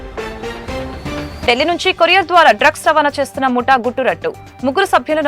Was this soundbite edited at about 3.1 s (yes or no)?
no